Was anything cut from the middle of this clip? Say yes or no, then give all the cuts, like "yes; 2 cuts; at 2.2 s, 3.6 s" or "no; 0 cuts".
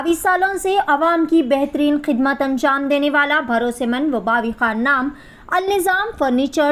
no; 0 cuts